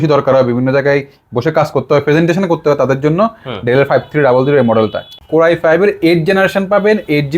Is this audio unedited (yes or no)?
no